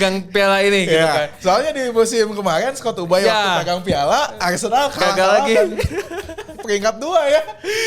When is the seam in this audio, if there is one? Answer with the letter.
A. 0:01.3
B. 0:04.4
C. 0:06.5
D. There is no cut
D